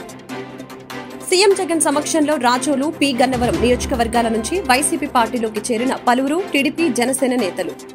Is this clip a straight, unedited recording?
yes; 0 cuts

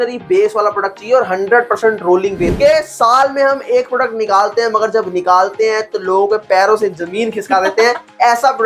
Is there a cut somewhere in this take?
yes; 1 cut; at 2.5 s

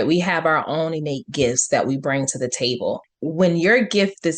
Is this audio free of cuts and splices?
no; 1 cut; at 3.1 s

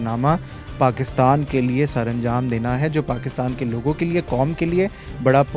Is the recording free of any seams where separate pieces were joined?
yes; 0 cuts

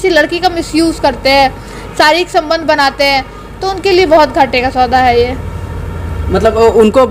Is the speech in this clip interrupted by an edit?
no; 0 cuts

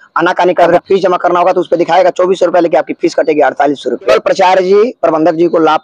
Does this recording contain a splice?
yes; 2 cuts; at 0.8 s, 4.2 s

